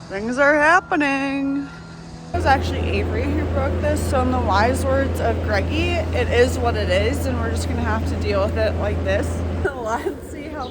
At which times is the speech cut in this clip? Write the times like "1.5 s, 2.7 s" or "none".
2.3 s, 9.6 s